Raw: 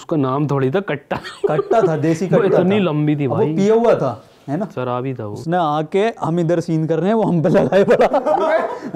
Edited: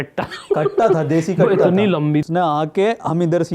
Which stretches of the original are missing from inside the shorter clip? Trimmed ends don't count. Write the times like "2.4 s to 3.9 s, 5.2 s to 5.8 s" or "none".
3.2 s to 5.4 s